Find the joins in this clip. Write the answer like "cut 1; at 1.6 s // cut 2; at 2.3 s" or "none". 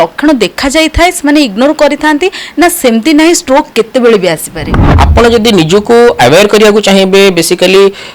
cut 1; at 4.8 s

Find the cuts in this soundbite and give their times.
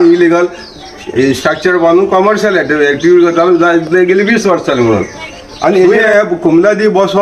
cut 1; at 6.0 s

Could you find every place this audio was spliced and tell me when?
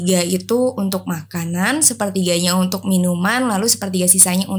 none

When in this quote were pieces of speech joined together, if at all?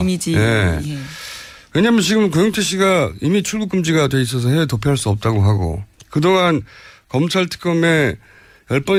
none

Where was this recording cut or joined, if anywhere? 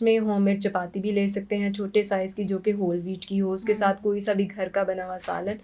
none

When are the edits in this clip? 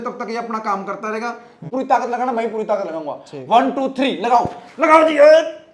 cut 1; at 1.6 s

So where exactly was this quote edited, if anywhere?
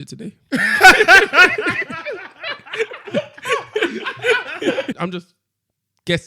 cut 1; at 5.0 s

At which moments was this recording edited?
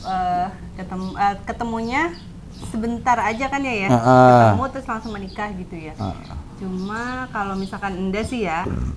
none

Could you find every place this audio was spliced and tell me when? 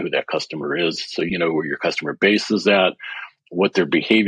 cut 1; at 1.3 s

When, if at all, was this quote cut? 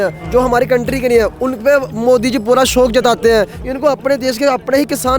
cut 1; at 3.6 s

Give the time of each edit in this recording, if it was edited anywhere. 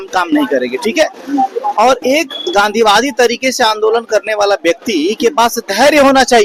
none

